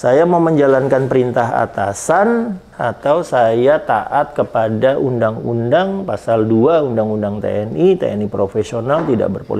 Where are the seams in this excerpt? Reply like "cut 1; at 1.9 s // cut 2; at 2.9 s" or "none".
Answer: none

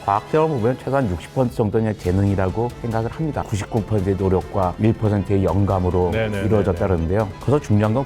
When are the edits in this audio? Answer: cut 1; at 3.4 s

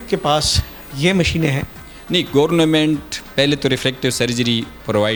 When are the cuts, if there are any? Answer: none

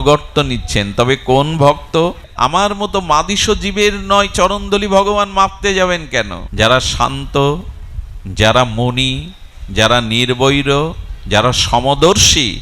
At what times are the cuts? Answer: cut 1; at 2.2 s // cut 2; at 6.4 s

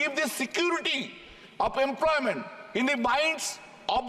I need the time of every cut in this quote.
none

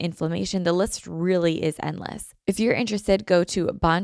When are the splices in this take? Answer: cut 1; at 2.3 s

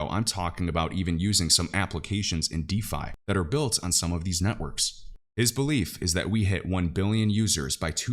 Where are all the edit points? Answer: cut 1; at 5.0 s

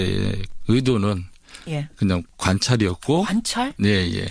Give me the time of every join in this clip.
cut 1; at 3.3 s

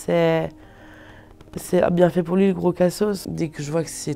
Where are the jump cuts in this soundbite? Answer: cut 1; at 3.2 s

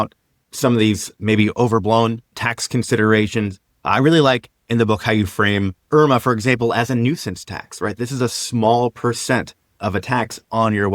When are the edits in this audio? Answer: none

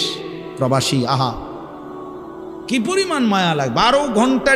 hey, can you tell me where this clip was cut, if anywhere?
none

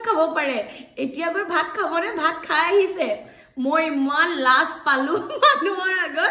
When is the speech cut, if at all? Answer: none

